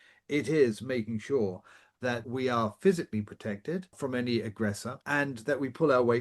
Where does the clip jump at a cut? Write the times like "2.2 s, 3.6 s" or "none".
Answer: 2.2 s, 3.9 s, 5.0 s